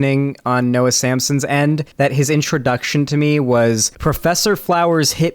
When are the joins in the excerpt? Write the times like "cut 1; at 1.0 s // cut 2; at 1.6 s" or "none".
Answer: cut 1; at 1.9 s // cut 2; at 3.9 s